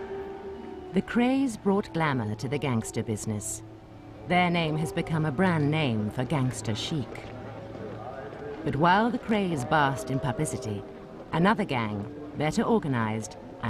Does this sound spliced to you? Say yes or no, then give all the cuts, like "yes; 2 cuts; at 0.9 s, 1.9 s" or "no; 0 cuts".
no; 0 cuts